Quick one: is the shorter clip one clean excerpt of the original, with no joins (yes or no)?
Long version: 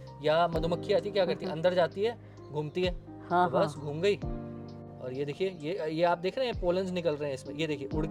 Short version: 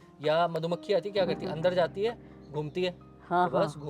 yes